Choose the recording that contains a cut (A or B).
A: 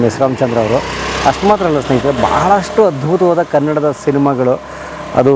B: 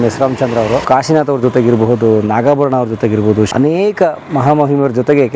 B